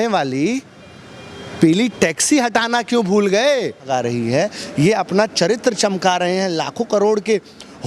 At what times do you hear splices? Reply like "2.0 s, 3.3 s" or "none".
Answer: 3.9 s